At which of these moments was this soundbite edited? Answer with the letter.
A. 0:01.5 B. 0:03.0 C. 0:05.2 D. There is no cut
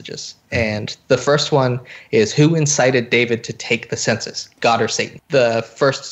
C